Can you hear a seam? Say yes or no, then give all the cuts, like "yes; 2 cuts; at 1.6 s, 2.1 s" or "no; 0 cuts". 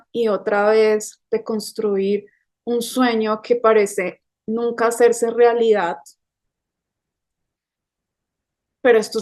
no; 0 cuts